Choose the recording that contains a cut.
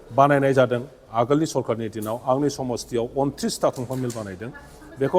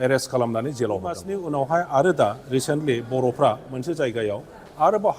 second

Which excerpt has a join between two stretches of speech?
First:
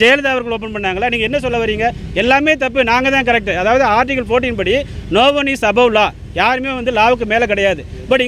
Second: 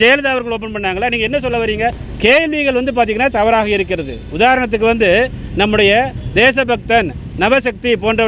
second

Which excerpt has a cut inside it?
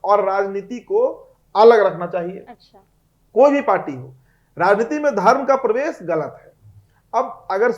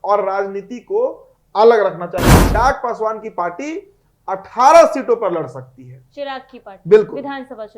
second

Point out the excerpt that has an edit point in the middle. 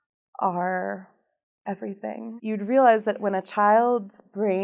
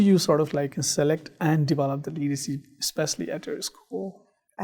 first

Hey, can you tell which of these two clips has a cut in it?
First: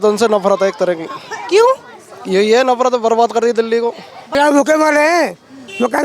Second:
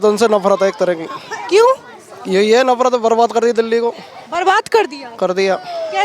first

